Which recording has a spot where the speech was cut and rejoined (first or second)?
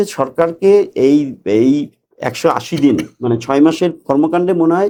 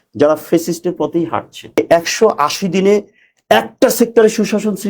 second